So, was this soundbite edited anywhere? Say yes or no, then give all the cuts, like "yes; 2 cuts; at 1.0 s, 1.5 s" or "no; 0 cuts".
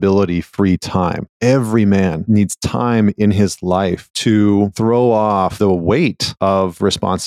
yes; 6 cuts; at 1.3 s, 2.2 s, 4.1 s, 4.7 s, 5.5 s, 6.3 s